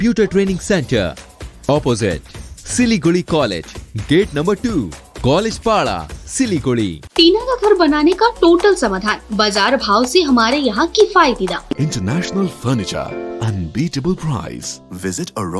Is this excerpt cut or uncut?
cut